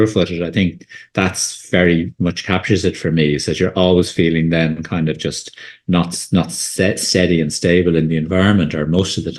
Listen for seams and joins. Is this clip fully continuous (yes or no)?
yes